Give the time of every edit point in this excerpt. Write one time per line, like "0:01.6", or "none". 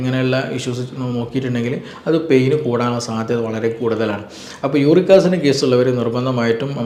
none